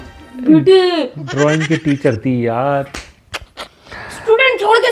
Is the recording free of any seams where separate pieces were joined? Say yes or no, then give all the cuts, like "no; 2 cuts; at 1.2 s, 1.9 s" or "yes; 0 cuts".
no; 1 cut; at 3.0 s